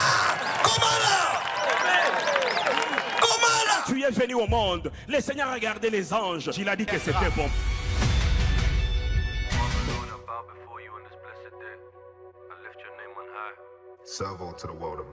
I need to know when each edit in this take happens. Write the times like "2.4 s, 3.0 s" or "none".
10.0 s